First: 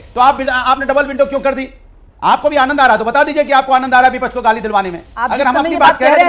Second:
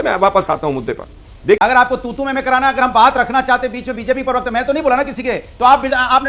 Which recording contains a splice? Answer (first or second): second